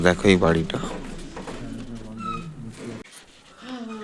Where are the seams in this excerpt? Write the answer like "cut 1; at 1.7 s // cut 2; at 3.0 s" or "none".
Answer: cut 1; at 3.0 s